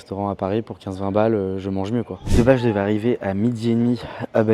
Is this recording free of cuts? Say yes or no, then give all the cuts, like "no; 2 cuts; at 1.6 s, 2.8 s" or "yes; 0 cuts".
no; 1 cut; at 2.2 s